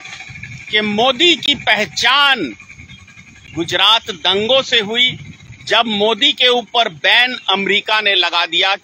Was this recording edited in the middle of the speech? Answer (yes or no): no